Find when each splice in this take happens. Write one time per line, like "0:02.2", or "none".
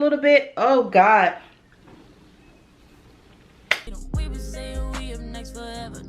0:03.9

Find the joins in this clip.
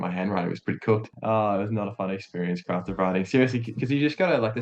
0:01.1

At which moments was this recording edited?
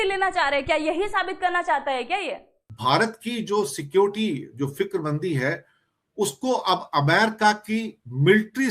0:02.7

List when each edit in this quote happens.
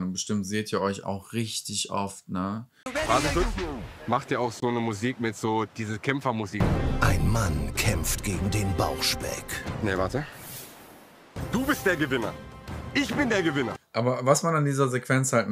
0:02.9
0:13.8

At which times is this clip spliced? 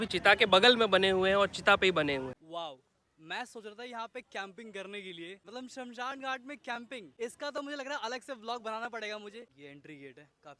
none

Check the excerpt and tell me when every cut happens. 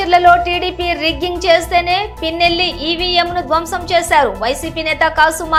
none

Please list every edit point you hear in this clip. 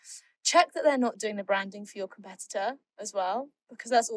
none

